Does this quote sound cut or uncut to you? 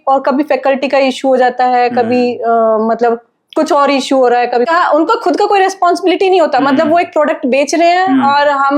cut